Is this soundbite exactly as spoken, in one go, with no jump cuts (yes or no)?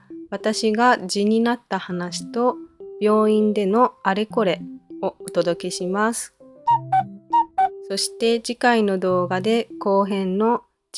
yes